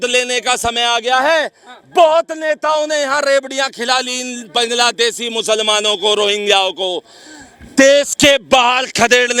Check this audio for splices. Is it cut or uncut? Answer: uncut